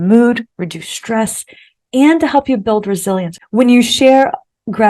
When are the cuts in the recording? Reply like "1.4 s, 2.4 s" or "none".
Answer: 3.4 s